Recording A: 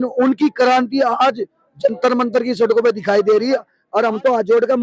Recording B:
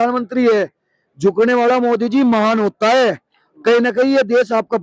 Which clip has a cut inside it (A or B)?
A